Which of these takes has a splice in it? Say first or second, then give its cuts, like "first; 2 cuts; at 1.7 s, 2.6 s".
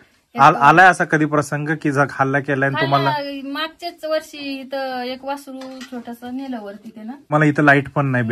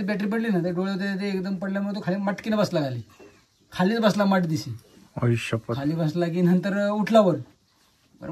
first; 1 cut; at 7.3 s